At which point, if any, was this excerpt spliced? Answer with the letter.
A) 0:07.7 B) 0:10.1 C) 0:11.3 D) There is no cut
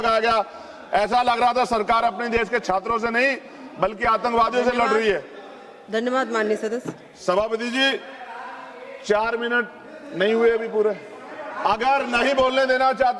D